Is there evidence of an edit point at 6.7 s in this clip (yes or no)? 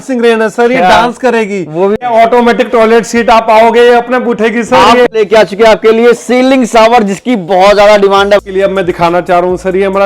no